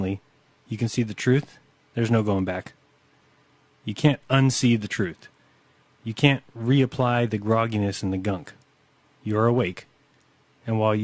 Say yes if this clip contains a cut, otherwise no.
no